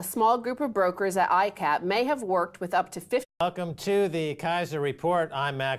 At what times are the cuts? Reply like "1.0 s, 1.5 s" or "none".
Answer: none